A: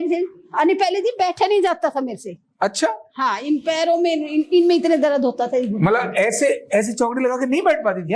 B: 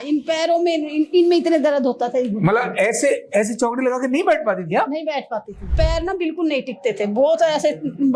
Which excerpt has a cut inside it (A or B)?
B